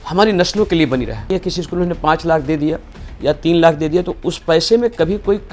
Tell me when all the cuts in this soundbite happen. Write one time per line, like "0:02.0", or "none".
0:01.3